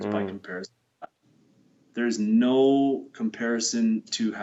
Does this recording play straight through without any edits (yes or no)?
yes